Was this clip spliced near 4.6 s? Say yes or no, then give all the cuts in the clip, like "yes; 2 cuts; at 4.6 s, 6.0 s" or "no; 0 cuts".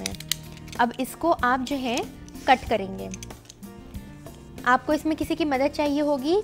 yes; 2 cuts; at 3.1 s, 4.6 s